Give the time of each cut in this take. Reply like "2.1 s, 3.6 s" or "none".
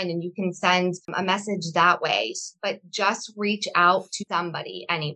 4.2 s